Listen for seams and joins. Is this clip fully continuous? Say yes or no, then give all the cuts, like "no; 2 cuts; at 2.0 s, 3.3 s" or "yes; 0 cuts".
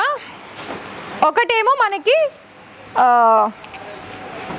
yes; 0 cuts